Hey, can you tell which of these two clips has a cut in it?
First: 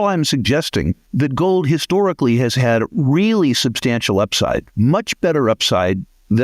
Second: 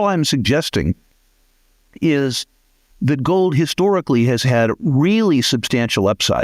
first; 2 cuts; at 1.0 s, 4.7 s

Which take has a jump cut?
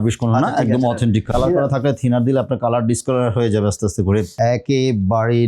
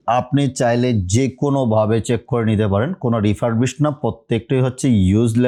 first; 2 cuts; at 1.3 s, 4.3 s

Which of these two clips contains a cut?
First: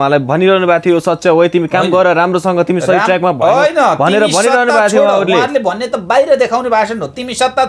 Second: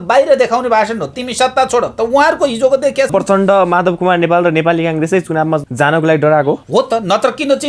second; 3 cuts; at 3.1 s, 5.7 s, 6.6 s

